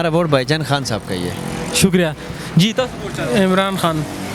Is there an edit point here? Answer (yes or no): no